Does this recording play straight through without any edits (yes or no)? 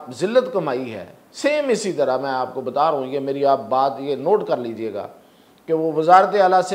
yes